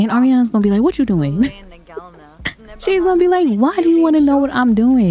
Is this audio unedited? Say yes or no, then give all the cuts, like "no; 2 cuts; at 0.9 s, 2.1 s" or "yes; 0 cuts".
yes; 0 cuts